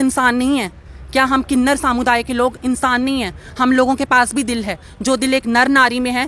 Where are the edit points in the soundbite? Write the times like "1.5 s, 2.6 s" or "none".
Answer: none

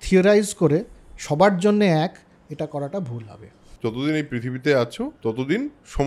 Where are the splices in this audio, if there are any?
3.7 s, 5.1 s

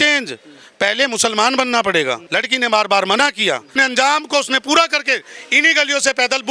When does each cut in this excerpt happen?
2.3 s, 3.7 s

